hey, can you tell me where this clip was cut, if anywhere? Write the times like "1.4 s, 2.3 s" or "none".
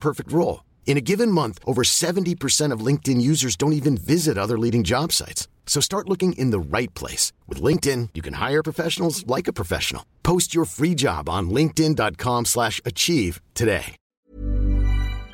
14.0 s